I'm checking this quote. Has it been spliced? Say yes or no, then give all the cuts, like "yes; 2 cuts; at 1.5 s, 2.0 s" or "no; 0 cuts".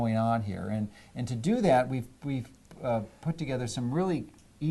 yes; 1 cut; at 2.9 s